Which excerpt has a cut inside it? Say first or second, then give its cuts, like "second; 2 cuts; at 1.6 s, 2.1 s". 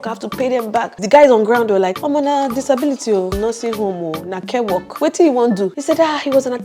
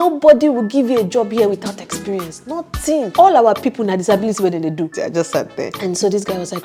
first; 5 cuts; at 1.0 s, 2.0 s, 3.4 s, 4.9 s, 5.8 s